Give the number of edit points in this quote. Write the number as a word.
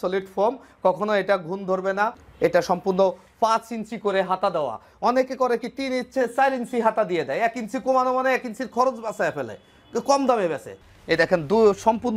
two